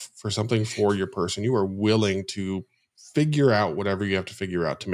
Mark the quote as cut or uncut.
uncut